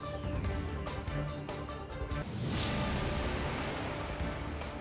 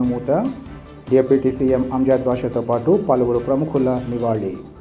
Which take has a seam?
first; 1 cut; at 2.1 s

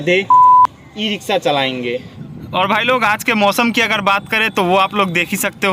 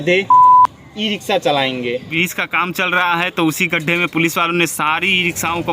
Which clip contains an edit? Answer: second; 1 cut; at 2.1 s

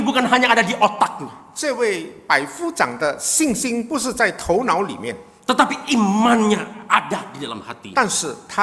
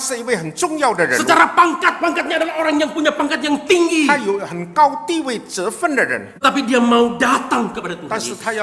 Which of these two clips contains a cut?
second; 1 cut; at 6.3 s

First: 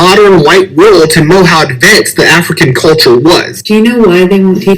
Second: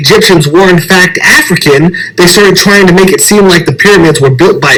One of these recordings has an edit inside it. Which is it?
first; 1 cut; at 3.5 s

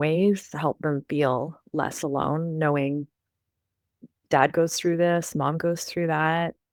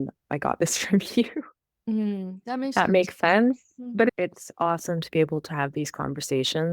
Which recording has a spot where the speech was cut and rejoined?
second; 1 cut; at 4.1 s

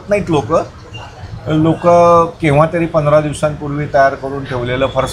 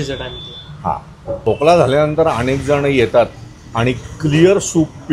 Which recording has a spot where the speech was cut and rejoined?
second; 1 cut; at 1.4 s

